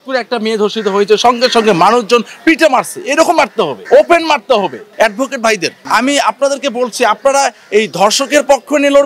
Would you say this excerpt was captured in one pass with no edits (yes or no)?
no